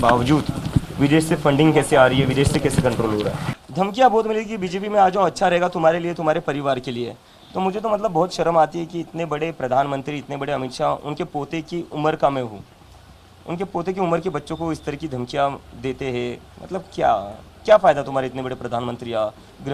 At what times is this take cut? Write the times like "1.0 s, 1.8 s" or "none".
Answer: 3.6 s

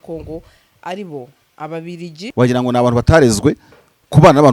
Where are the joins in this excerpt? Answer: 2.2 s

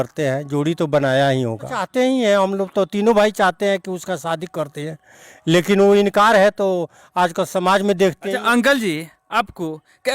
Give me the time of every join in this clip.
1.9 s, 8.2 s

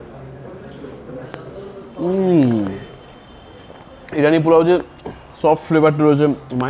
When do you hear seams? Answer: none

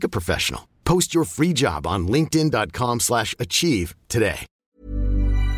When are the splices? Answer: 4.5 s

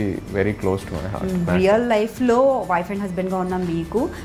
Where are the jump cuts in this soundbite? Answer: 1.5 s

